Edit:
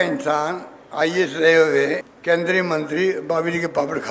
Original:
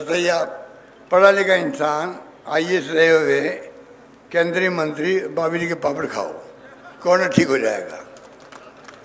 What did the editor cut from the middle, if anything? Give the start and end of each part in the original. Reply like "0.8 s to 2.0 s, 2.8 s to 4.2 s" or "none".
3.6 s to 4.2 s